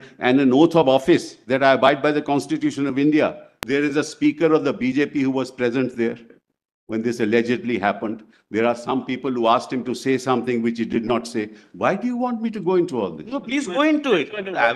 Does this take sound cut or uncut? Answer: cut